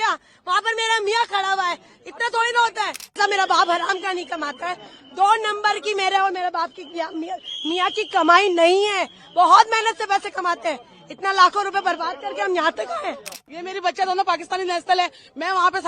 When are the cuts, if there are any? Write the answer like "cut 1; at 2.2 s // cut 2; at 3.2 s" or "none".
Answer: cut 1; at 3.2 s // cut 2; at 13.4 s